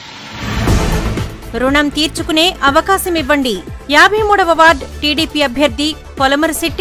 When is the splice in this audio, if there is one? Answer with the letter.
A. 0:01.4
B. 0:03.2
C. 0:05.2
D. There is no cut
A